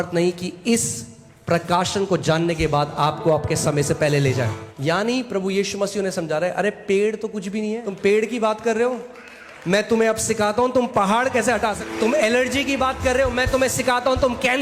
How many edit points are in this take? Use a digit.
3